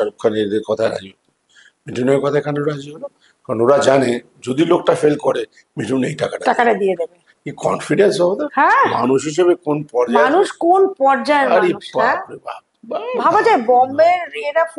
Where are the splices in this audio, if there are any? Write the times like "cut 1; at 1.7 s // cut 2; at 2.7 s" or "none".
none

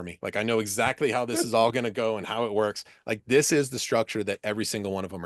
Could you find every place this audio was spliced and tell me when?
none

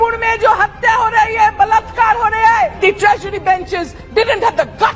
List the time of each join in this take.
cut 1; at 2.8 s

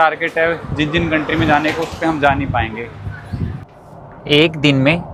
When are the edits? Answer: cut 1; at 3.6 s

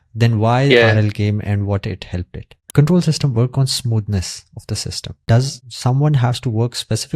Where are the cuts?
cut 1; at 2.5 s // cut 2; at 5.2 s

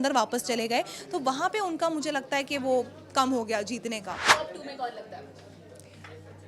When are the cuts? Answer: cut 1; at 4.2 s

